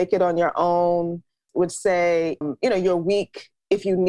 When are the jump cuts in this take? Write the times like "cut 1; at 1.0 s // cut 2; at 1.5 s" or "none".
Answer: cut 1; at 1.4 s // cut 2; at 2.4 s